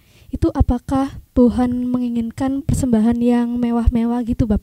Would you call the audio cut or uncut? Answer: uncut